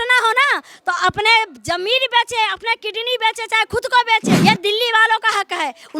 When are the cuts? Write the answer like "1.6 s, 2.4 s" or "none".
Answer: 4.3 s